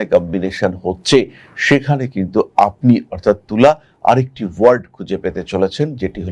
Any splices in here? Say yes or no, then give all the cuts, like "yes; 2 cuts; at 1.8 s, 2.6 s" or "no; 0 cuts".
no; 0 cuts